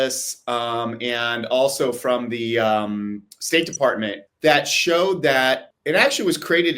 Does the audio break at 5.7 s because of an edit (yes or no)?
yes